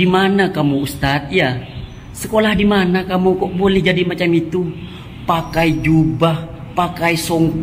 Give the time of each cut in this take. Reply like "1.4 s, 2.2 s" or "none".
none